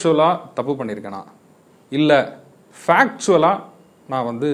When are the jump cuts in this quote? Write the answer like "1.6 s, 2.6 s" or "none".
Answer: none

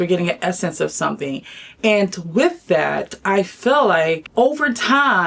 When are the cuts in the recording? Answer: 4.2 s

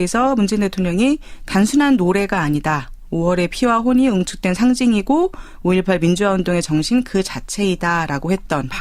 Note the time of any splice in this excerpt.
5.8 s

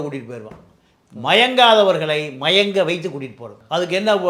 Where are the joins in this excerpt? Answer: none

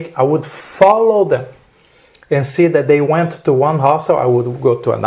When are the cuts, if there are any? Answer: none

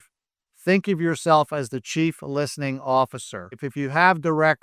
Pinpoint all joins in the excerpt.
3.6 s

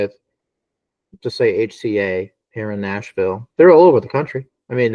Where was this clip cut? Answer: 3.4 s

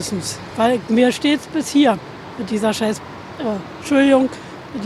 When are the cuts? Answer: none

